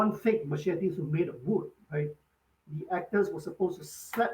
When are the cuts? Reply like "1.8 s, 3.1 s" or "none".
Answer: none